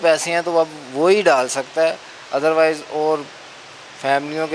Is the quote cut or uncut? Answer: uncut